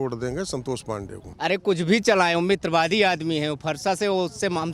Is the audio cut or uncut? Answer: cut